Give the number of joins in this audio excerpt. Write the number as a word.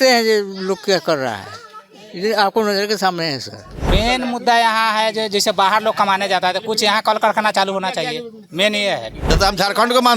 two